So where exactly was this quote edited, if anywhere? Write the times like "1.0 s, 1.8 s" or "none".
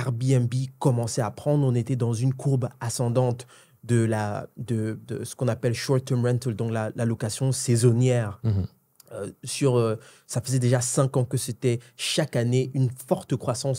none